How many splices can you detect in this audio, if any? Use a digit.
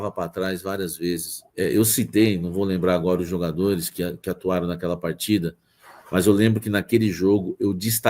1